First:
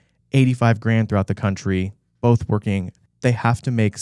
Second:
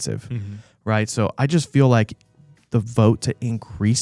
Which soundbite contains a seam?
first; 1 cut; at 3.0 s

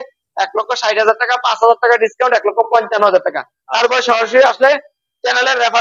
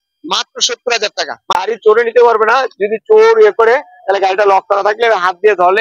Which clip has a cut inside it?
second; 1 cut; at 1.5 s

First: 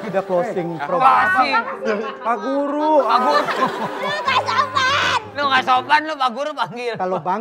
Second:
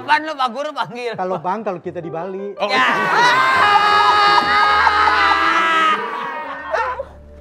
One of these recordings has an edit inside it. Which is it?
second; 1 cut; at 6.4 s

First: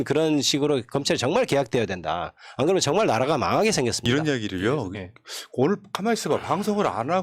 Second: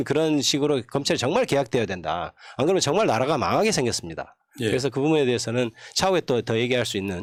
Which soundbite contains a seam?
first; 1 cut; at 4.1 s

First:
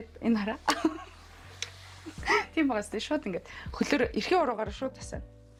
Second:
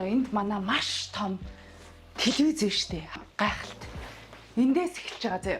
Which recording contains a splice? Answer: second; 1 cut; at 3.2 s

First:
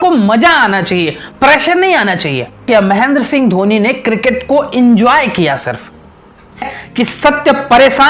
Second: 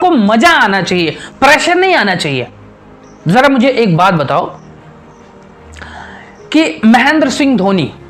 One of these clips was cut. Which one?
first; 2 cuts; at 2.7 s, 6.7 s

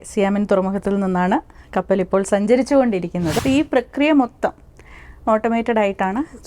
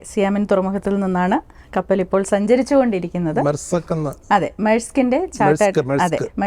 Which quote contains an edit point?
first; 1 cut; at 3.4 s

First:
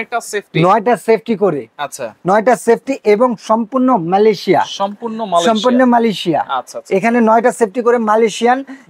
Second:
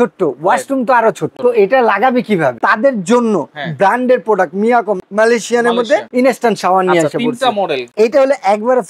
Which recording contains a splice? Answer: second; 5 cuts; at 1.3 s, 2.6 s, 5.0 s, 6.1 s, 7.9 s

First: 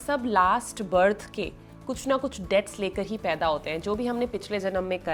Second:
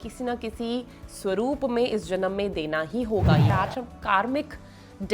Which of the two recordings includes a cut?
second; 1 cut; at 3.5 s

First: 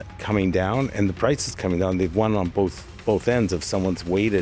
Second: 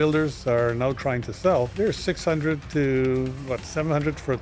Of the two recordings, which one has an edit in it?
second; 1 cut; at 1.7 s

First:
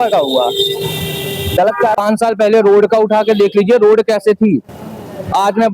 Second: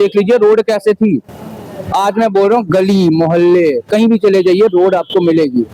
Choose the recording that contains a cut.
first; 1 cut; at 1.9 s

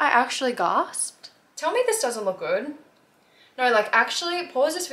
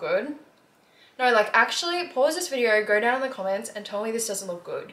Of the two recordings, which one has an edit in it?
first; 1 cut; at 1.5 s

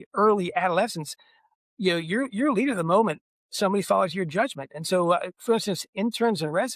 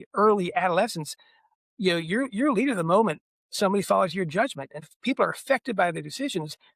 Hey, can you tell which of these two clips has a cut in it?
second; 1 cut; at 4.8 s

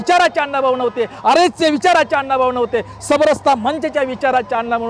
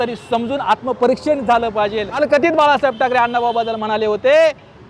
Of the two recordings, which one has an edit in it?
second; 1 cut; at 2.2 s

